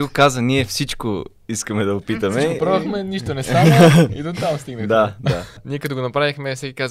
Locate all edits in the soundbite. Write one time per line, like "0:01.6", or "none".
0:05.6